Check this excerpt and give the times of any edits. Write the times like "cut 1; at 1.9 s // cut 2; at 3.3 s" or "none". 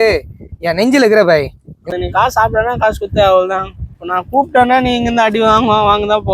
cut 1; at 1.9 s